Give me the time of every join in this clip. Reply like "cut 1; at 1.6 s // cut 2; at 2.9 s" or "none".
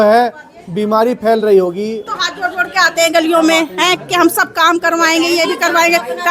cut 1; at 2.0 s